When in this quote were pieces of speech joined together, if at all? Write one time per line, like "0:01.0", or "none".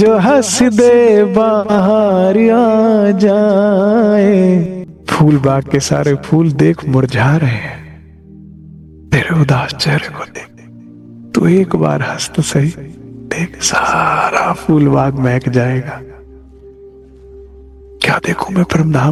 none